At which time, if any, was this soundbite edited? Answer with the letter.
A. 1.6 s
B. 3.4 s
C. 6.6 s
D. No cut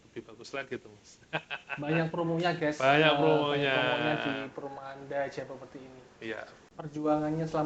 C